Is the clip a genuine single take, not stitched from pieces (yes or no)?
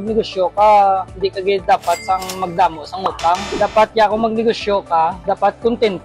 no